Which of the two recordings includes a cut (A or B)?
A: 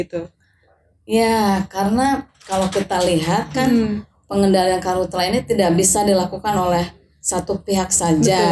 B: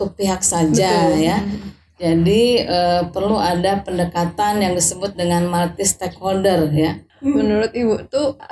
B